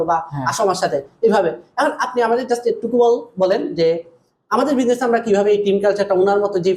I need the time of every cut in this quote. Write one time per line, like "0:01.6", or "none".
none